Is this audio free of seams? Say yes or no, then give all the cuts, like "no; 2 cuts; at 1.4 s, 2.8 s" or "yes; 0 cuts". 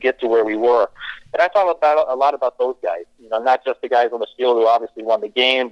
yes; 0 cuts